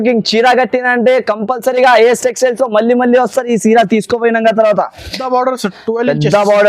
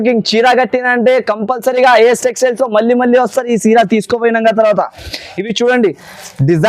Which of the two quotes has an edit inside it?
first; 1 cut; at 5.1 s

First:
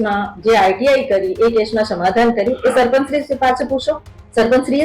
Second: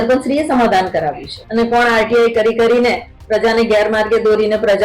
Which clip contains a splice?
second; 1 cut; at 1.3 s

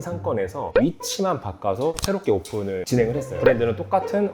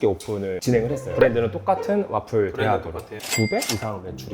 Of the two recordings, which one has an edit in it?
second; 1 cut; at 3.2 s

